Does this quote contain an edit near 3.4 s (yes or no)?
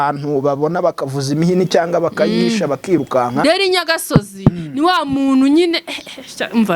yes